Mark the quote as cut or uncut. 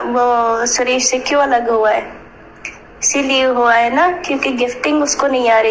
uncut